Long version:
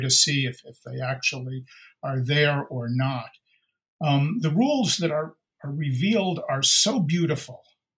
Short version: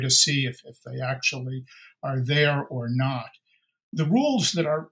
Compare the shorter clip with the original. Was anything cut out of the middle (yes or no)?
yes